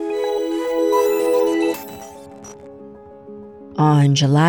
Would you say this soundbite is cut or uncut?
cut